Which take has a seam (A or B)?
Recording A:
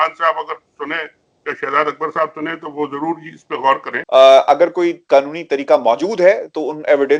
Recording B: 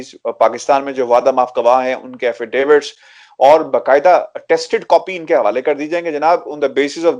A